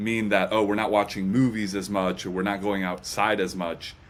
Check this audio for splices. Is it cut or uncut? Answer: uncut